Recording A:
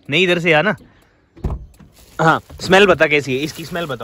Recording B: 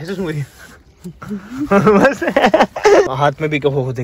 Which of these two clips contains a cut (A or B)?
B